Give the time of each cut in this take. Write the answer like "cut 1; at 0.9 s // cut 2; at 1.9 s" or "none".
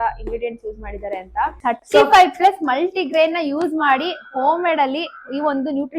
cut 1; at 1.6 s